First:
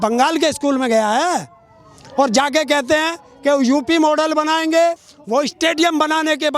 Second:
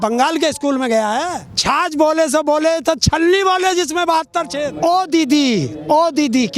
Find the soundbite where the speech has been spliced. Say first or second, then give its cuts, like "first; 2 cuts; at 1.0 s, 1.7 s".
second; 2 cuts; at 1.5 s, 4.6 s